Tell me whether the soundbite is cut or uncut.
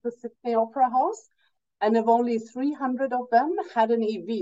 uncut